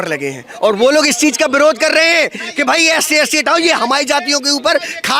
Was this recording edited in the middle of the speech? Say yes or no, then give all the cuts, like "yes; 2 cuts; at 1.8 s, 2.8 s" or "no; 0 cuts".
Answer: no; 0 cuts